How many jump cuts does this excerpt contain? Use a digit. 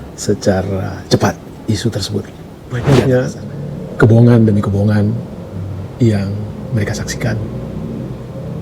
1